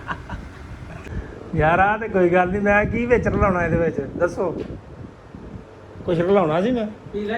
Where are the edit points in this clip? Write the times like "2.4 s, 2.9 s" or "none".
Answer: 0.9 s